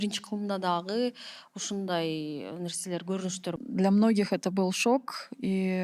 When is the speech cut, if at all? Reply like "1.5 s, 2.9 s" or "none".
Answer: 3.5 s

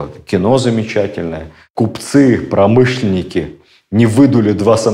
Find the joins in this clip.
1.6 s

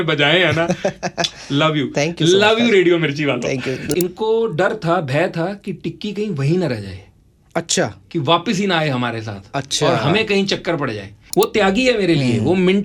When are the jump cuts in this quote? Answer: 3.9 s, 11.2 s

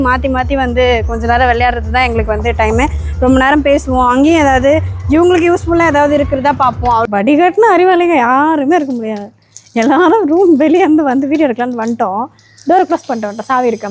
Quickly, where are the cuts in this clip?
7.0 s

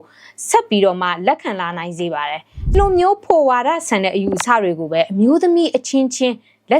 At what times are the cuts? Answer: 2.7 s

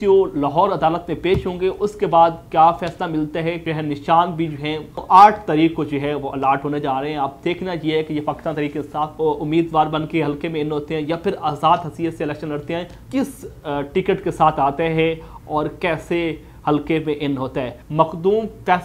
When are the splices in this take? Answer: 3.6 s, 5.0 s, 9.1 s, 12.9 s, 17.8 s

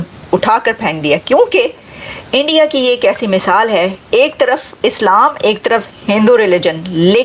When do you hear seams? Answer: 4.0 s

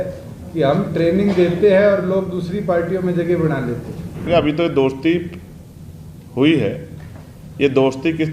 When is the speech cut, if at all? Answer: 4.3 s

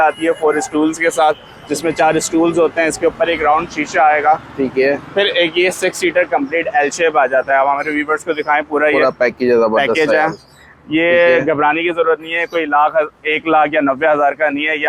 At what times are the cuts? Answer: none

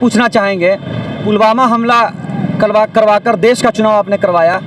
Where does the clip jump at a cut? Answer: 1.2 s

